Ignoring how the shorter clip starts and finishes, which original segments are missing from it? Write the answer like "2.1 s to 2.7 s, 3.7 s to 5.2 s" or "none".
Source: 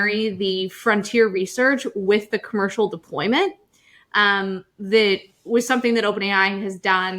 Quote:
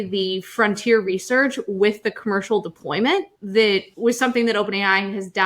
4.1 s to 5.3 s